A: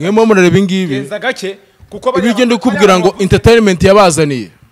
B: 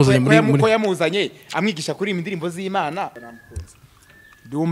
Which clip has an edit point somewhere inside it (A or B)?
B